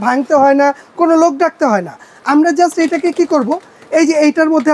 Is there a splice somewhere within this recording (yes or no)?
no